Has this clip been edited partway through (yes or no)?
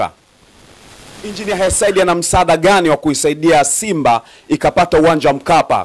yes